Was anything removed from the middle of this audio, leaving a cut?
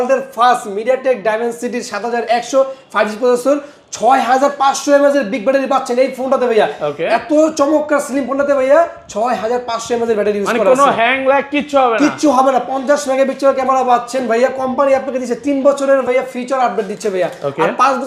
no; 0 cuts

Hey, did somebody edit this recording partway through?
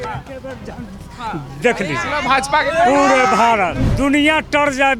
yes; 1 cut; at 3.8 s

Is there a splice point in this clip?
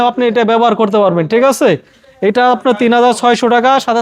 no; 0 cuts

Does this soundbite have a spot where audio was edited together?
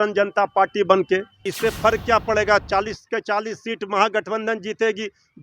yes; 1 cut; at 1.4 s

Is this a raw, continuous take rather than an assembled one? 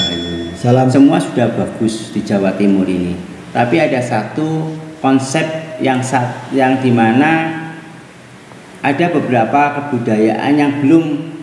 no; 1 cut; at 0.9 s

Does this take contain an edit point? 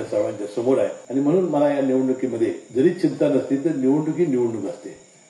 yes; 2 cuts; at 1.0 s, 2.6 s

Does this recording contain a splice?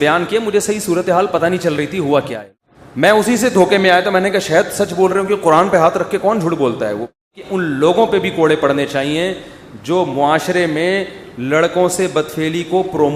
yes; 2 cuts; at 2.4 s, 7.2 s

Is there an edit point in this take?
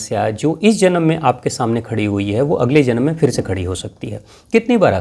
no; 0 cuts

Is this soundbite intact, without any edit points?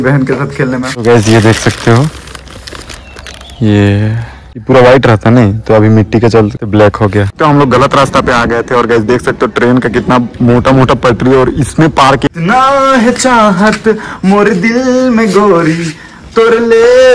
no; 4 cuts; at 1.0 s, 4.6 s, 7.3 s, 12.3 s

